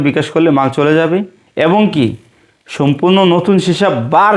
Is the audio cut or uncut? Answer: uncut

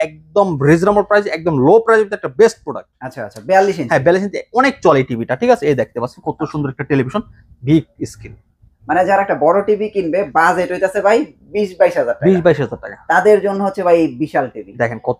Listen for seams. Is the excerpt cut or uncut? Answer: uncut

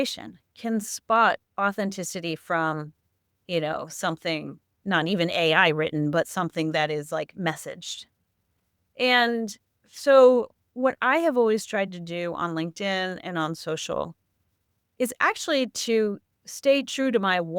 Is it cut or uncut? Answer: cut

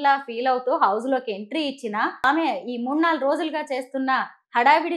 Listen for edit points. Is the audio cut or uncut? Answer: cut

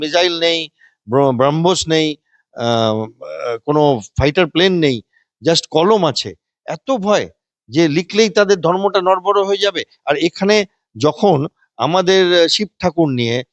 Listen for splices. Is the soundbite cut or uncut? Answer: uncut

